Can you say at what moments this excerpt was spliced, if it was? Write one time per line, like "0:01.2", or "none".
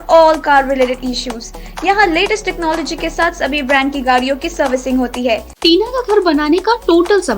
0:05.5